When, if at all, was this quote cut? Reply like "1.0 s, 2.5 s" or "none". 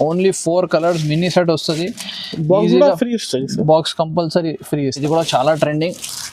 5.0 s